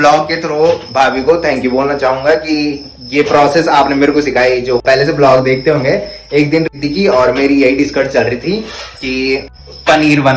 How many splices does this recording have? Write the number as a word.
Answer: zero